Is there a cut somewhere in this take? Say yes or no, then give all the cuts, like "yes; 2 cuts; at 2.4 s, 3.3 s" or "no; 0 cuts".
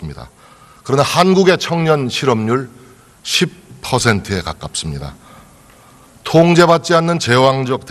yes; 1 cut; at 5.1 s